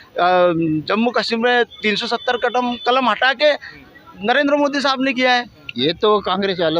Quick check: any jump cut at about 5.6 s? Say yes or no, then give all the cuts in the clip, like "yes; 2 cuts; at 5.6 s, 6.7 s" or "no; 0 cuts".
yes; 1 cut; at 5.6 s